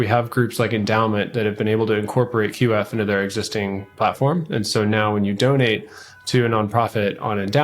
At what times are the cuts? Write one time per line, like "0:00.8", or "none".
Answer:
0:02.5